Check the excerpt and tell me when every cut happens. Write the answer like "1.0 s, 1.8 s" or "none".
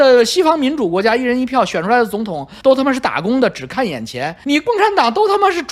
none